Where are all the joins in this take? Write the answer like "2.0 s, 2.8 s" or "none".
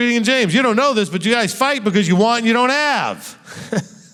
none